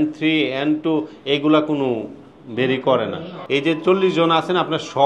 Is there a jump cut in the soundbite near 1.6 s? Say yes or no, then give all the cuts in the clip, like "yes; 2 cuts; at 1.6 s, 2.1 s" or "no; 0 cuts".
no; 1 cut; at 3.3 s